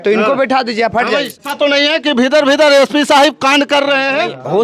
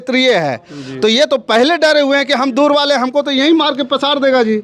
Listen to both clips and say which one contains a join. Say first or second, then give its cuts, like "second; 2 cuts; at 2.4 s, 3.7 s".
first; 1 cut; at 1.3 s